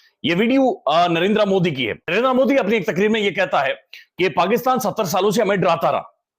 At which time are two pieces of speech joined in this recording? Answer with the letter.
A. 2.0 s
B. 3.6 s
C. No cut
A